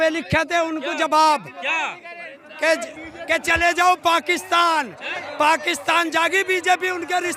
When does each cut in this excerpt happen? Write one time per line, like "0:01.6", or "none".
none